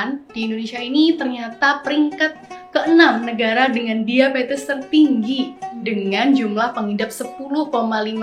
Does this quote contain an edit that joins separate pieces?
no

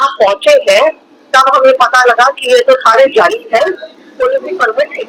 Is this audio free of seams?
yes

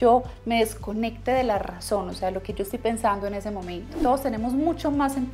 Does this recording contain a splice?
yes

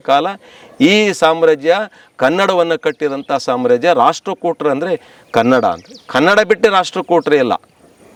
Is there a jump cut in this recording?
no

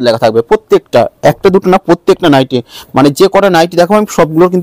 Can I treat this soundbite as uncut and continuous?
yes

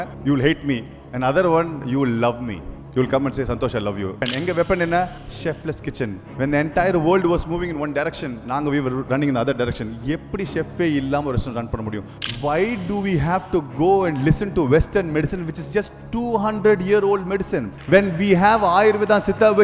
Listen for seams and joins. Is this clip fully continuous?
no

